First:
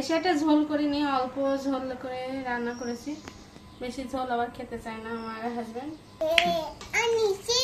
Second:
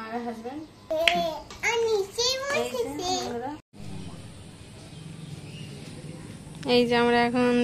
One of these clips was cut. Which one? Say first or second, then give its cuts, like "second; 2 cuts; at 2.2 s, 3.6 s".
second; 1 cut; at 3.7 s